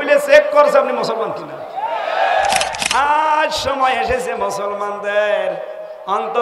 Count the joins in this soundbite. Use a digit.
1